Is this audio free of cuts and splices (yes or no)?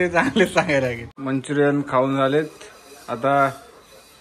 no